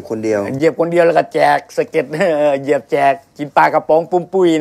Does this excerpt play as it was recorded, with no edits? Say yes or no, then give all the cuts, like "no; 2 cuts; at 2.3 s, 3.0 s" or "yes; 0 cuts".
no; 1 cut; at 3.3 s